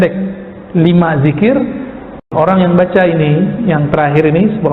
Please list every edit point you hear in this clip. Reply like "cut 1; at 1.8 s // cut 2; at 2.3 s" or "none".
cut 1; at 2.3 s